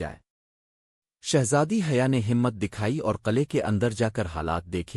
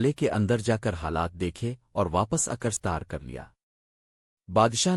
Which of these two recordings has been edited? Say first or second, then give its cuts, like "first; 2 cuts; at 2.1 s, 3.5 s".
second; 1 cut; at 2.8 s